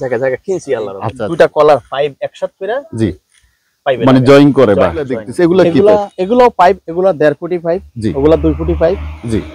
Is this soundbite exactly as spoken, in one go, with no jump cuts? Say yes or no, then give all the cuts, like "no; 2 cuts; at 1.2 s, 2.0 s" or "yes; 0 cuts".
no; 2 cuts; at 1.0 s, 5.2 s